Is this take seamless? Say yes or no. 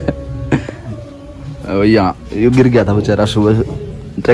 yes